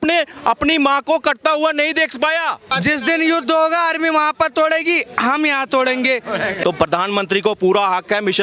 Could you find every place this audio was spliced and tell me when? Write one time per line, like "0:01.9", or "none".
0:02.7
0:06.6